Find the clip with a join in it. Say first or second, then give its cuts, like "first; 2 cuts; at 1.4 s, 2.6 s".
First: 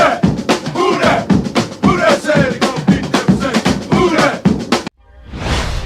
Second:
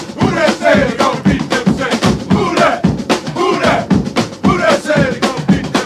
first; 1 cut; at 4.9 s